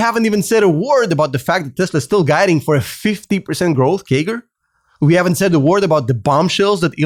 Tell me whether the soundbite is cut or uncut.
uncut